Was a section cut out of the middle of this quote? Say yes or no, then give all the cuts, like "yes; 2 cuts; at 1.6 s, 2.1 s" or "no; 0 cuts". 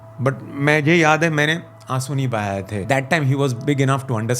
yes; 1 cut; at 2.9 s